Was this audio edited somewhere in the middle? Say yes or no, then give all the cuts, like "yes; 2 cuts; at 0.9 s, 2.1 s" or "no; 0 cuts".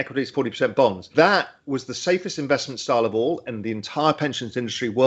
no; 0 cuts